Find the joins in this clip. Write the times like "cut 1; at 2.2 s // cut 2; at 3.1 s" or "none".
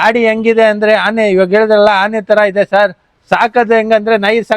none

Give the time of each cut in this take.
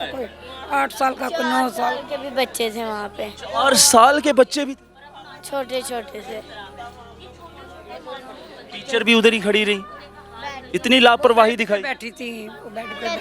none

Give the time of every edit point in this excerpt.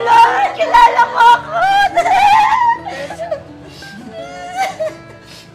cut 1; at 3.3 s

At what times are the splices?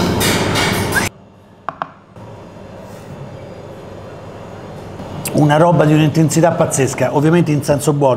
cut 1; at 1.1 s // cut 2; at 2.2 s

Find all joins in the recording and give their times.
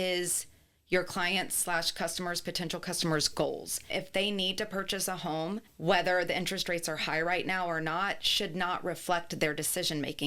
cut 1; at 3.7 s // cut 2; at 5.7 s

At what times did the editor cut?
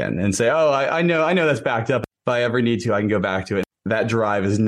cut 1; at 2.0 s // cut 2; at 3.6 s

